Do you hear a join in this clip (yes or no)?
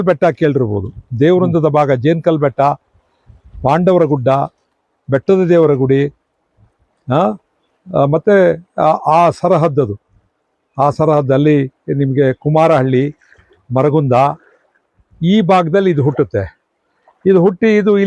no